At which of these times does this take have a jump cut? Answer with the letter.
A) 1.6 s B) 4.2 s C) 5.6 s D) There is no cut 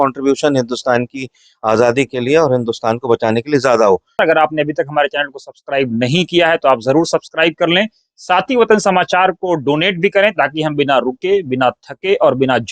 B